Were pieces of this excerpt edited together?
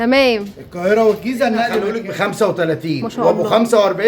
yes; 1 cut; at 1.8 s

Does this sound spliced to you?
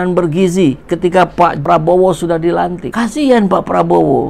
yes; 2 cuts; at 1.6 s, 2.8 s

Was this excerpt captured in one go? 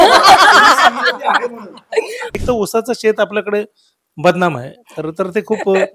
no; 1 cut; at 2.4 s

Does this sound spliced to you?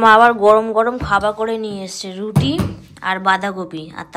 no; 0 cuts

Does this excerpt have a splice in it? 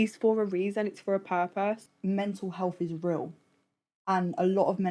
yes; 1 cut; at 1.9 s

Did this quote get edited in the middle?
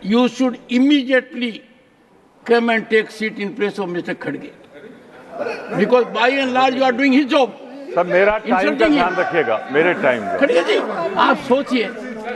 no; 0 cuts

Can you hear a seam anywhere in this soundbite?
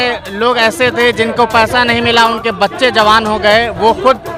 no; 0 cuts

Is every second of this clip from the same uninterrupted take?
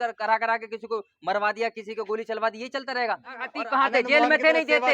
no; 1 cut; at 3.6 s

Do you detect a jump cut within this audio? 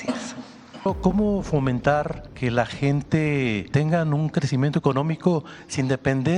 yes; 3 cuts; at 0.9 s, 2.2 s, 3.6 s

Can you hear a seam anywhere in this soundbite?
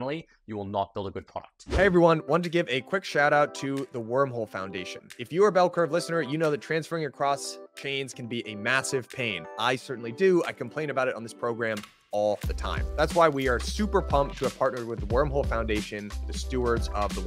yes; 1 cut; at 1.5 s

